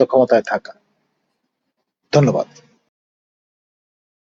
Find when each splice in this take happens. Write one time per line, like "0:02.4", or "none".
none